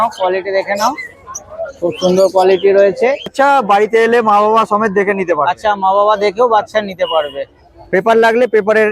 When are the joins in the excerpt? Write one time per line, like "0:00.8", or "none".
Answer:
0:03.3